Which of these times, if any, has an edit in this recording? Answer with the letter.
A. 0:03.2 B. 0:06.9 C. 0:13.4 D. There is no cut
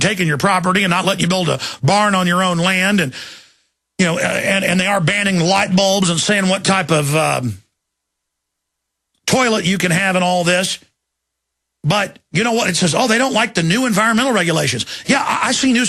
B